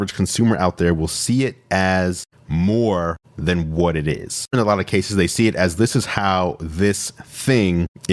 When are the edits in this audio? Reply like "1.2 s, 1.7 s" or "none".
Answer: 4.5 s